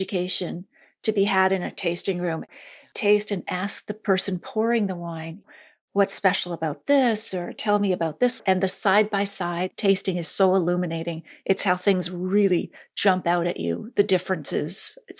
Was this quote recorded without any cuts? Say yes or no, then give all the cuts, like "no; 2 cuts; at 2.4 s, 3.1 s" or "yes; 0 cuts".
no; 2 cuts; at 2.8 s, 5.3 s